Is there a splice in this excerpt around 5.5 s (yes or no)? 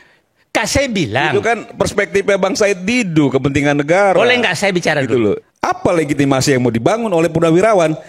yes